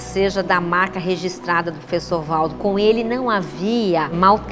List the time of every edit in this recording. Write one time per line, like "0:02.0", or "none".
none